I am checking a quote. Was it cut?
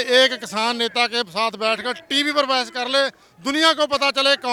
no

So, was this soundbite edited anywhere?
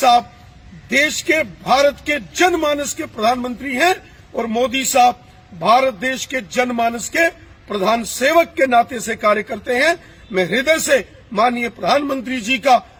no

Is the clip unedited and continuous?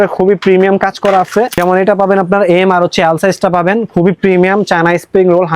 no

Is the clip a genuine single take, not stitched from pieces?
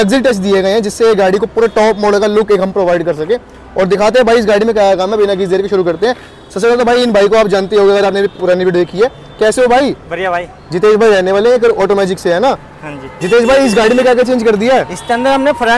yes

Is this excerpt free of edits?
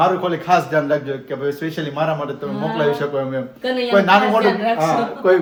yes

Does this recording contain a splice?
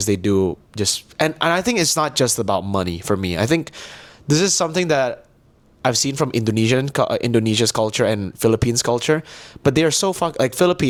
no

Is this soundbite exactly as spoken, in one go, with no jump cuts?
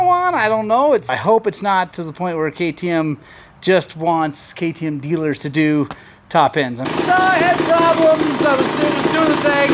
no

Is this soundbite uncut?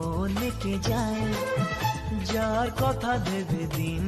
yes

